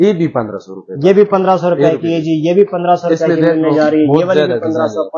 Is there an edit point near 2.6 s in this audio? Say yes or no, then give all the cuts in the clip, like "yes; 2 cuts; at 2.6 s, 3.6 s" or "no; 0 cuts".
no; 0 cuts